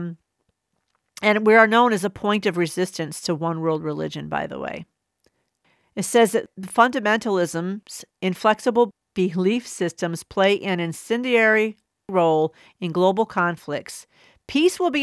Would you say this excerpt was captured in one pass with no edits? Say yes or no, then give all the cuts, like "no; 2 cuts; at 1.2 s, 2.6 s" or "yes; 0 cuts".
yes; 0 cuts